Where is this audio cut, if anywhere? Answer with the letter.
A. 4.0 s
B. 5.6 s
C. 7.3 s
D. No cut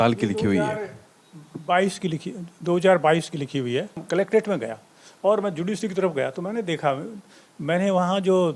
A